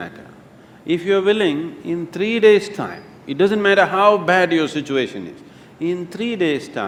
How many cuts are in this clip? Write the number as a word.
zero